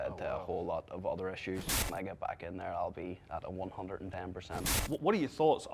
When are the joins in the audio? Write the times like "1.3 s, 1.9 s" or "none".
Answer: 1.9 s, 4.7 s